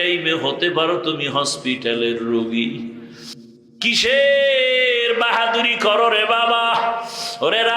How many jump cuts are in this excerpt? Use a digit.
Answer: 1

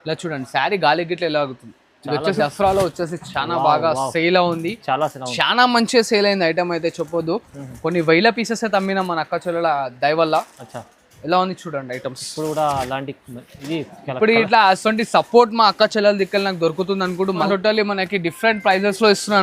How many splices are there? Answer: 2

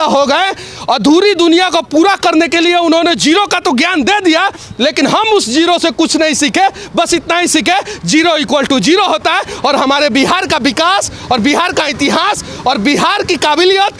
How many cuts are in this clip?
0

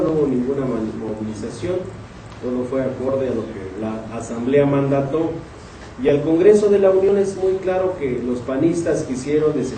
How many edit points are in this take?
1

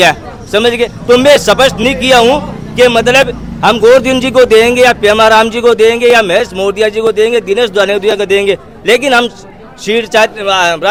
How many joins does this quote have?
0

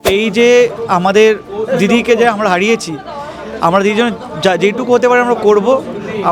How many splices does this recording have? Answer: 0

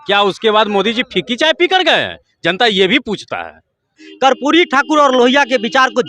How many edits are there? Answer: 1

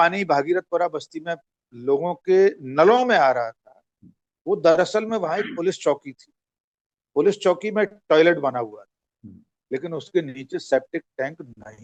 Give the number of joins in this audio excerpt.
0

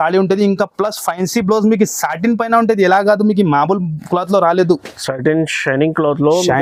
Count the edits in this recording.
0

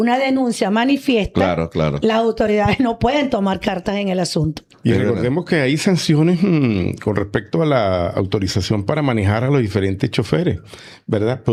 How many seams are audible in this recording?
0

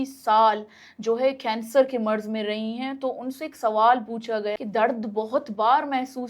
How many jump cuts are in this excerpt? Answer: 1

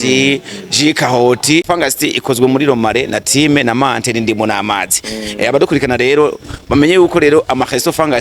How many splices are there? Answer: 1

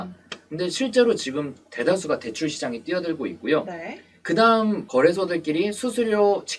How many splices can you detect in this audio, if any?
1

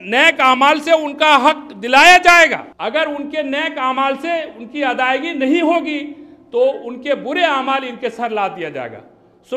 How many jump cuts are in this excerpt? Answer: 1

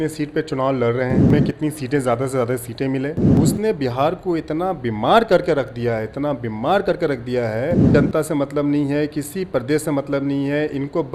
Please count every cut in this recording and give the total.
3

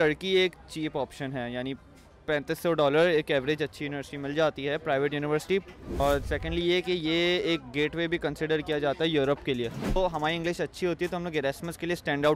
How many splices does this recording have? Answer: 2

